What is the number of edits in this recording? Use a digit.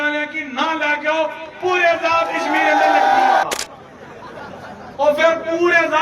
1